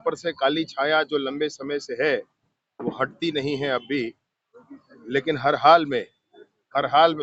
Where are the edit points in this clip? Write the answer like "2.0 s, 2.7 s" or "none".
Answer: none

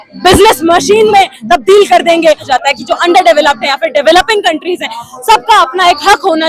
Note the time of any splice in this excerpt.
2.5 s

